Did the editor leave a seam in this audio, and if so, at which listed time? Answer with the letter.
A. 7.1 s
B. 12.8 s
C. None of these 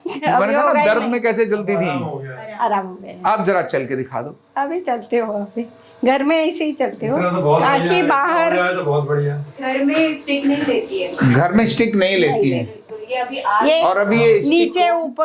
C